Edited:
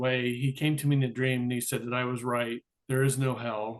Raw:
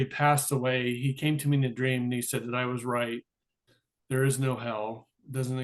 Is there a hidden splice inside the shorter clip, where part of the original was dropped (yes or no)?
yes